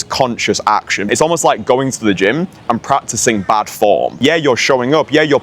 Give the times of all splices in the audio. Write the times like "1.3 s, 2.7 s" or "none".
1.1 s, 4.1 s